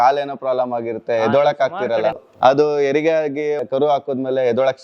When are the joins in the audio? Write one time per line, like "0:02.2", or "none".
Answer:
0:02.3
0:03.6